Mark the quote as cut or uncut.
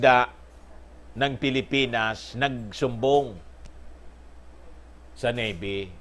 uncut